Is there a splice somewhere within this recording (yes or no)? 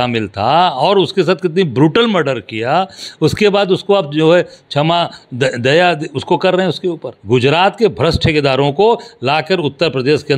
yes